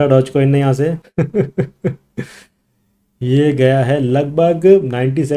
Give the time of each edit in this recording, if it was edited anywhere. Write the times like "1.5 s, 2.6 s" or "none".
1.0 s